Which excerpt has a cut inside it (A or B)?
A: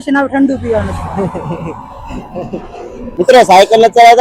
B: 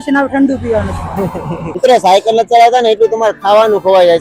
B